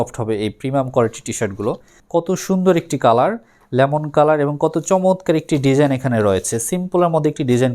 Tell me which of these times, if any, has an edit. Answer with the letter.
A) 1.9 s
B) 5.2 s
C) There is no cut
A